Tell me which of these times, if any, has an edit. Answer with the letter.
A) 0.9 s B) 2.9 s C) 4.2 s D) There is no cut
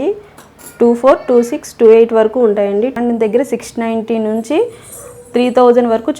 B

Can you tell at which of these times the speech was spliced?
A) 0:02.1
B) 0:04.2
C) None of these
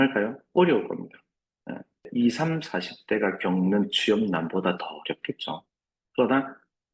A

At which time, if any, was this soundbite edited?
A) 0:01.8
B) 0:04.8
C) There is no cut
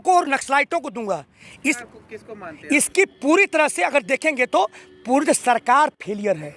A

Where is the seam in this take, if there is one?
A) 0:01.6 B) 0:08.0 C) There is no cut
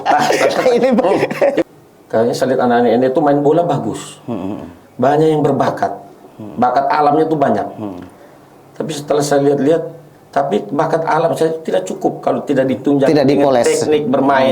A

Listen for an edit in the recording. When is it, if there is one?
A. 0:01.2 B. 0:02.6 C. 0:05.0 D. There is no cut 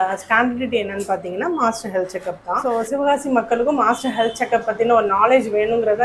B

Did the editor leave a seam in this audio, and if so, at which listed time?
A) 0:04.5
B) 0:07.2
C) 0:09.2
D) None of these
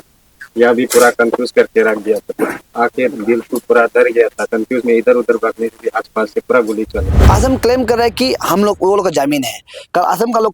B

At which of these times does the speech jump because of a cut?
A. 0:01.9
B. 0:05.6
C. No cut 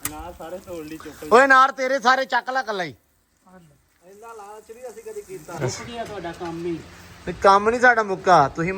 B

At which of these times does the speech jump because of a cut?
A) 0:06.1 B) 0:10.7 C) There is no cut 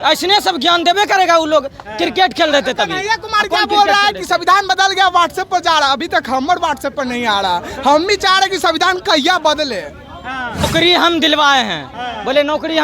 B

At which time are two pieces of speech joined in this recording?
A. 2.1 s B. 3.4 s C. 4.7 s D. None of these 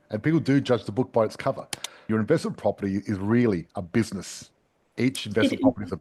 A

